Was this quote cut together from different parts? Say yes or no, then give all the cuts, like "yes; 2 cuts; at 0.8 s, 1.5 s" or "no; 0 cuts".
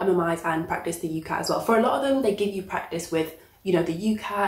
no; 0 cuts